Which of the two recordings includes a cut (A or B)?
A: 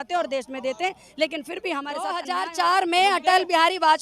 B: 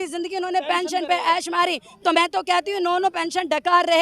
A